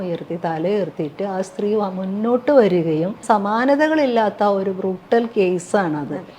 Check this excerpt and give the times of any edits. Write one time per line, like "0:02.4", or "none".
0:03.2